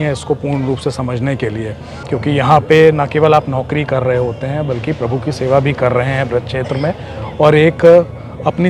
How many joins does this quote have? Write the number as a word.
one